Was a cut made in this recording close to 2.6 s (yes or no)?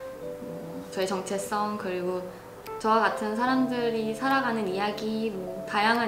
yes